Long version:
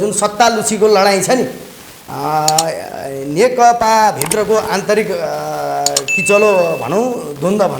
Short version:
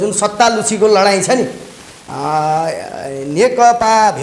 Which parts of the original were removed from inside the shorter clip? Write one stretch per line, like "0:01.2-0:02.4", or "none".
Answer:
none